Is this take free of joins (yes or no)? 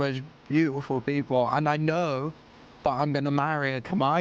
yes